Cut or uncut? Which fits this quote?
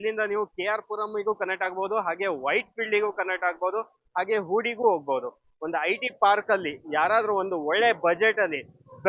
uncut